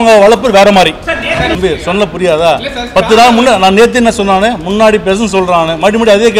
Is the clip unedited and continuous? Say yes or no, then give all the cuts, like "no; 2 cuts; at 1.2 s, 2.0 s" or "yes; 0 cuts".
no; 1 cut; at 1.6 s